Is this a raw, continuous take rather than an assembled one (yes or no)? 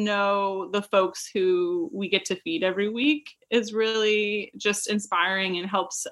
yes